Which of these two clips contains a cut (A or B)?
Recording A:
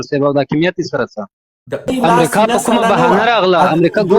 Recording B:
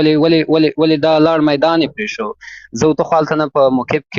A